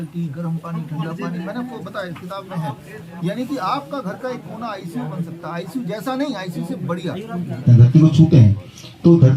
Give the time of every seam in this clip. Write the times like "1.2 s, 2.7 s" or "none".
7.6 s